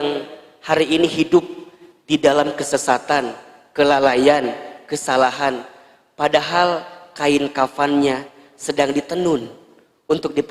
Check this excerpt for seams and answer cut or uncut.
uncut